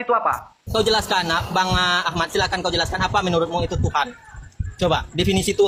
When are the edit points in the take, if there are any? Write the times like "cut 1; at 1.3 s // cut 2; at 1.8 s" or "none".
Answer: none

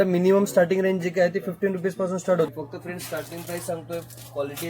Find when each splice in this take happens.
cut 1; at 2.5 s

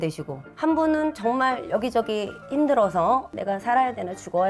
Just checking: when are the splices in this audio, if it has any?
none

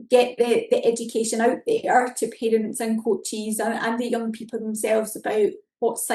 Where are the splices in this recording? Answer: none

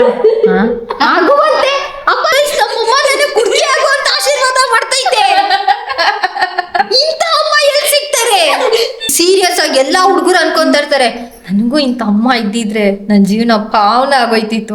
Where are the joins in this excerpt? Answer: cut 1; at 2.3 s // cut 2; at 6.8 s // cut 3; at 9.1 s

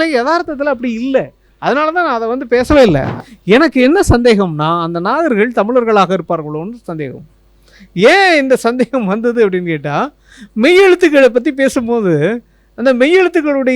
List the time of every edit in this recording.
cut 1; at 3.2 s

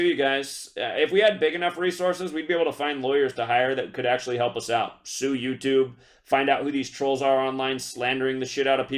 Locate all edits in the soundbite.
none

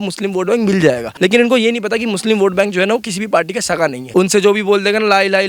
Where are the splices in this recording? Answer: cut 1; at 1.1 s // cut 2; at 4.0 s

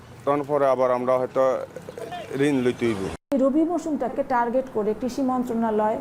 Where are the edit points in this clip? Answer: cut 1; at 3.3 s // cut 2; at 4.1 s

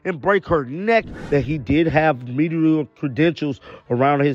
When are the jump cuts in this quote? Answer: cut 1; at 1.1 s

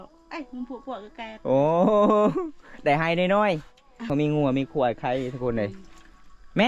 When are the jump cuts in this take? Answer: cut 1; at 4.0 s

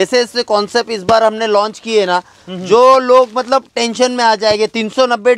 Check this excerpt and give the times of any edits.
none

